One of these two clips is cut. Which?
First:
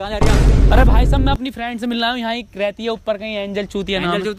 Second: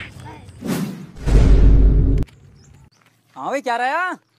second; 1 cut; at 1.3 s

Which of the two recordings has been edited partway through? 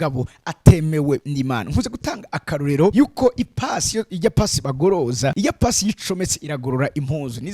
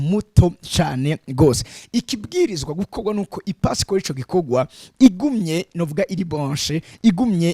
first; 2 cuts; at 2.9 s, 5.3 s

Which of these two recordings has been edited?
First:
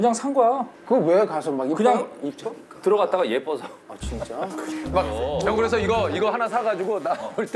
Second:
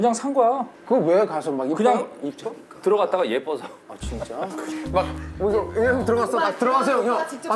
first; 1 cut; at 5.1 s

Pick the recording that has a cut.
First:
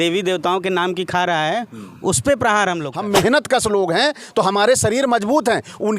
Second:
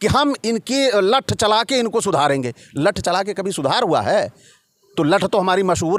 first; 1 cut; at 2.9 s

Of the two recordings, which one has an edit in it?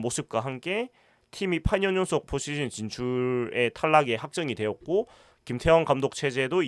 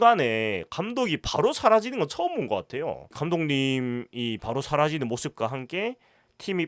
second; 1 cut; at 3.1 s

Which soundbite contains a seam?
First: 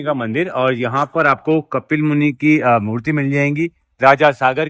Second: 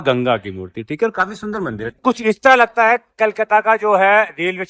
second; 1 cut; at 2.0 s

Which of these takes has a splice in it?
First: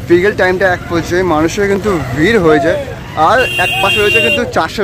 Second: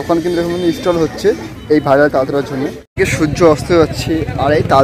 second; 1 cut; at 2.8 s

